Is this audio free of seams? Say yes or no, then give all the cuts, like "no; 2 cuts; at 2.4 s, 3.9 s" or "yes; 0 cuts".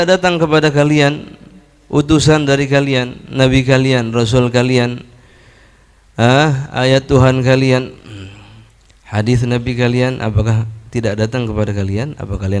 yes; 0 cuts